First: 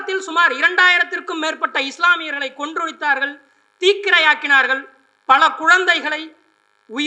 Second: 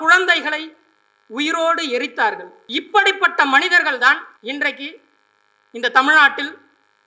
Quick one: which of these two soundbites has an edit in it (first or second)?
second